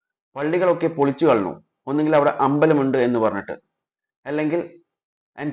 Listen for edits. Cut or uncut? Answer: uncut